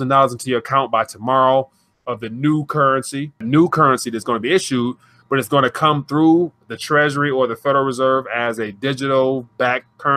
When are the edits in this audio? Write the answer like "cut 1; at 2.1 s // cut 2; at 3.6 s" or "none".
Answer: cut 1; at 3.4 s